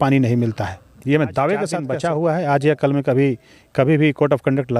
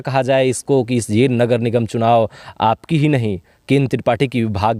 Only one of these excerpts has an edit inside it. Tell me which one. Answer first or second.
first